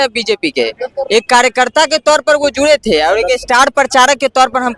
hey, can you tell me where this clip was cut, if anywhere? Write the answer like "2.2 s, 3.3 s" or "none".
none